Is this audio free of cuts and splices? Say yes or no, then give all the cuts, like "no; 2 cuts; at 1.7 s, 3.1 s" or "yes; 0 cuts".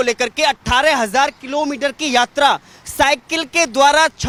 yes; 0 cuts